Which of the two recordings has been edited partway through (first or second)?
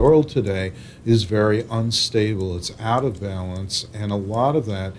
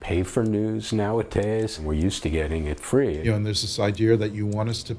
second